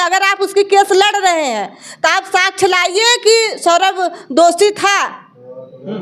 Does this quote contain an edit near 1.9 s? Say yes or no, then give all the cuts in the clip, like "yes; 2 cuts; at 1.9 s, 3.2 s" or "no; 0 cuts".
no; 0 cuts